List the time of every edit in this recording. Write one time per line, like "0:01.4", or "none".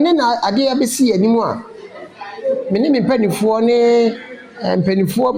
none